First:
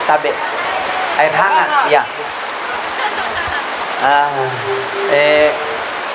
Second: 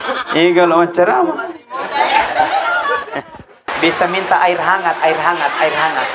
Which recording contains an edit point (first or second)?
second